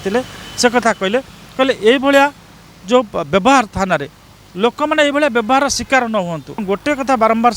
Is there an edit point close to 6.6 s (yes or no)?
yes